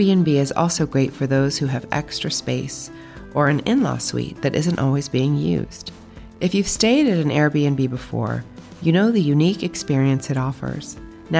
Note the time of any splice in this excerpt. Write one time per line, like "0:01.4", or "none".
none